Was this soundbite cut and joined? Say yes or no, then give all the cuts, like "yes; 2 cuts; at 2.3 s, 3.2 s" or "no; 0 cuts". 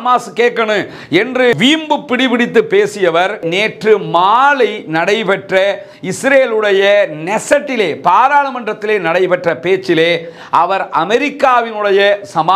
no; 0 cuts